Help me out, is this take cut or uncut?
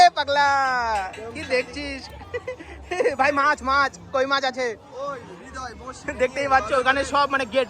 uncut